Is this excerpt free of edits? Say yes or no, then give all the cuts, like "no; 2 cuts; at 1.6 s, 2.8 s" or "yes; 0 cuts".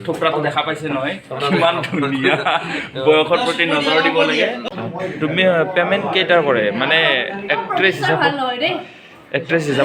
no; 1 cut; at 4.6 s